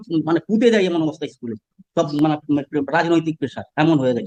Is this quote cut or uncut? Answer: uncut